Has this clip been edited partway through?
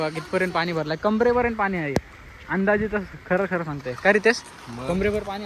no; 0 cuts

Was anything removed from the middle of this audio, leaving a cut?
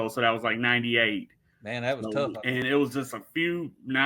yes; 1 cut; at 2.6 s

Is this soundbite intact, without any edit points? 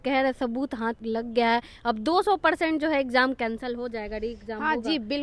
no; 1 cut; at 1.0 s

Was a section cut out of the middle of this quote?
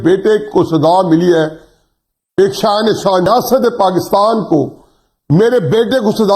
yes; 1 cut; at 3.3 s

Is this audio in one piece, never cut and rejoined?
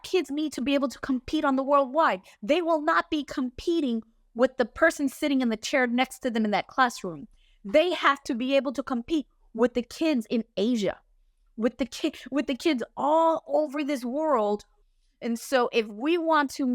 no; 1 cut; at 14.8 s

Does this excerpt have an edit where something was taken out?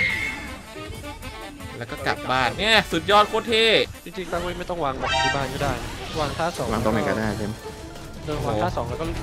yes; 1 cut; at 4.1 s

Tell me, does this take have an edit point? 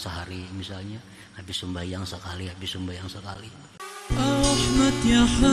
yes; 1 cut; at 3.6 s

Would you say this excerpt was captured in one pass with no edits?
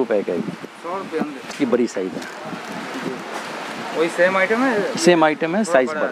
no; 1 cut; at 1.5 s

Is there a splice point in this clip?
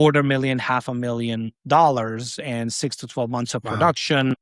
no; 0 cuts

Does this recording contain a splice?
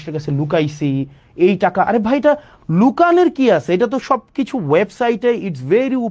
no; 0 cuts

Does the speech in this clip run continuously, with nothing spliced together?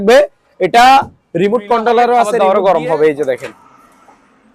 no; 1 cut; at 2.3 s

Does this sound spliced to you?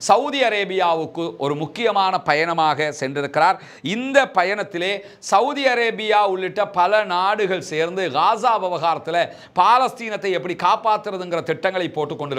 no; 0 cuts

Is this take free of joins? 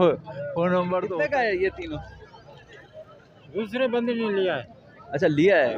no; 1 cut; at 1.1 s

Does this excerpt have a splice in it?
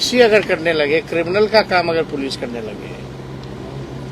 no; 0 cuts

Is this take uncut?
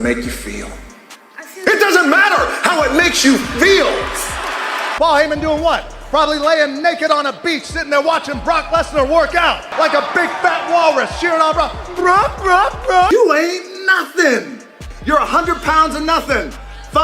no; 2 cuts; at 5.0 s, 13.1 s

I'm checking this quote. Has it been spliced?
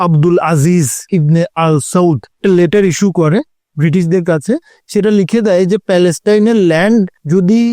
yes; 3 cuts; at 1.0 s, 2.3 s, 4.7 s

